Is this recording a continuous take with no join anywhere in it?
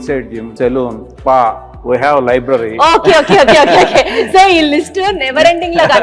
yes; 0 cuts

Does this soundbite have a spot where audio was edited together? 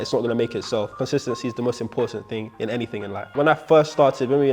yes; 2 cuts; at 1.0 s, 3.2 s

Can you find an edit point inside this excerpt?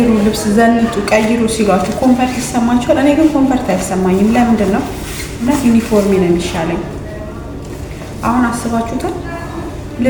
no; 0 cuts

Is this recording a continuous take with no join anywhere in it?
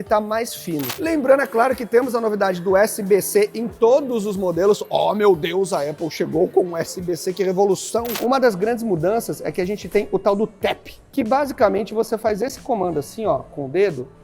no; 3 cuts; at 0.9 s, 8.2 s, 11.1 s

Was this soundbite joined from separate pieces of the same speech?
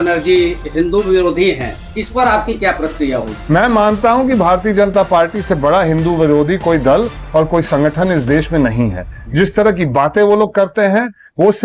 no; 0 cuts

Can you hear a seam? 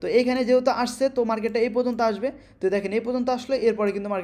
no; 0 cuts

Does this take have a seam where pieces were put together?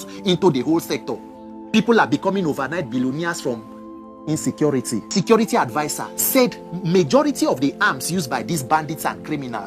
yes; 1 cut; at 5.1 s

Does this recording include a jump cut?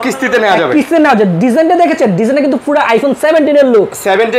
no; 0 cuts

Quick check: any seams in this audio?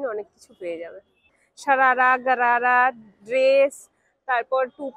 yes; 1 cut; at 1.2 s

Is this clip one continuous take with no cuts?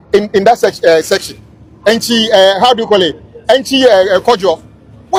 yes; 0 cuts

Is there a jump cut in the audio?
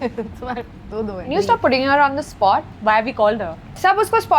yes; 1 cut; at 1.3 s

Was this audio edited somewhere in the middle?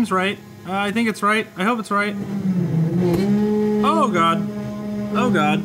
no; 0 cuts

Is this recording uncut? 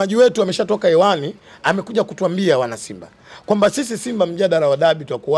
yes; 0 cuts

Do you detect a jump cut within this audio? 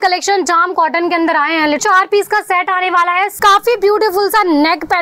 yes; 2 cuts; at 1.8 s, 3.3 s

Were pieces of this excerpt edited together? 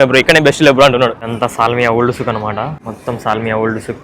yes; 2 cuts; at 1.2 s, 2.9 s

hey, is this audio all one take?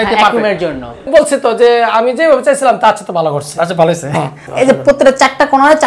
no; 2 cuts; at 1.1 s, 4.4 s

